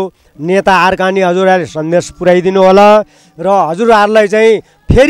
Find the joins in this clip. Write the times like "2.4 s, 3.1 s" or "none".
none